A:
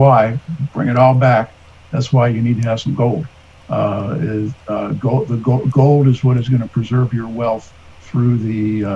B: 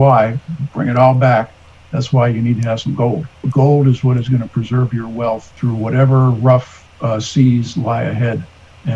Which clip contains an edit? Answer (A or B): B